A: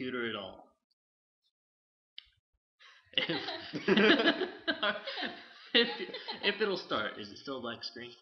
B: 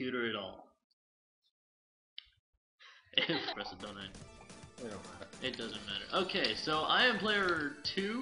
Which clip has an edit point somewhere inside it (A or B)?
A